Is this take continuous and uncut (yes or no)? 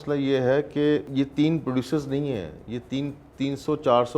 no